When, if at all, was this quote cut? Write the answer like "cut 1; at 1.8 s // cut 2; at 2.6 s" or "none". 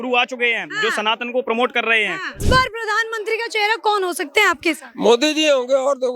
cut 1; at 2.4 s

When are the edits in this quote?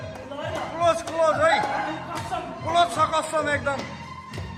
none

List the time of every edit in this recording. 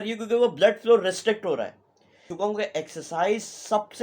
cut 1; at 2.3 s

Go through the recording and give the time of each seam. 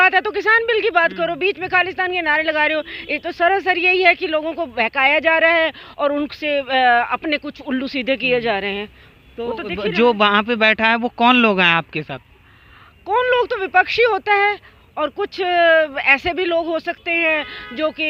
none

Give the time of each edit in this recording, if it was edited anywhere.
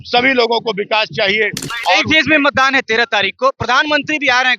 cut 1; at 1.6 s

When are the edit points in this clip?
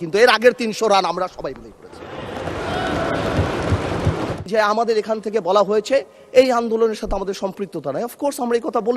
cut 1; at 4.4 s

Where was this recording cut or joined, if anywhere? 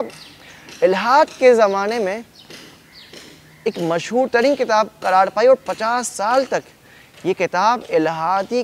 none

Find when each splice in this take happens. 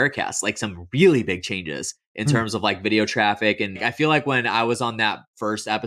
cut 1; at 3.8 s

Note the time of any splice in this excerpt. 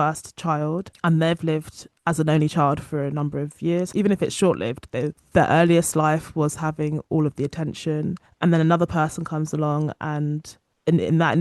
cut 1; at 0.9 s // cut 2; at 3.9 s

